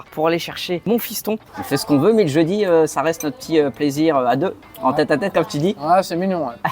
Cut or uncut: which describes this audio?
cut